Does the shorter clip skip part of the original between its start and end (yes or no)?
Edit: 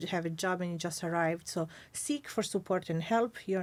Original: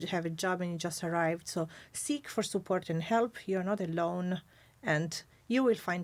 no